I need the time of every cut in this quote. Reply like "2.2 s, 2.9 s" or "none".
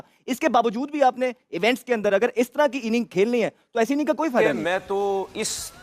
4.6 s